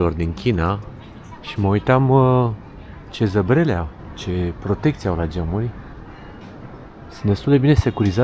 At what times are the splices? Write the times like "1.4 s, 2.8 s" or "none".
none